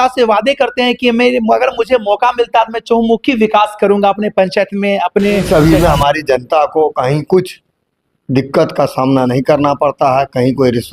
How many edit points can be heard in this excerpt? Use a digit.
1